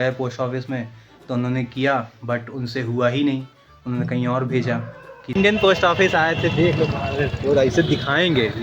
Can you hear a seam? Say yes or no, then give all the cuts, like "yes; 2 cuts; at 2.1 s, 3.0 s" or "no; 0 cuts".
yes; 1 cut; at 5.4 s